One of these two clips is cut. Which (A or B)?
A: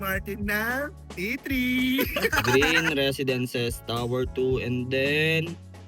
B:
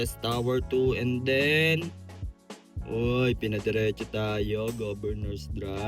A